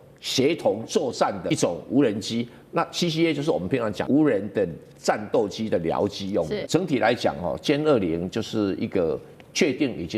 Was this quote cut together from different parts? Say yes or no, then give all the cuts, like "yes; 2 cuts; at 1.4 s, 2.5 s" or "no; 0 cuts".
yes; 3 cuts; at 1.4 s, 4.0 s, 6.6 s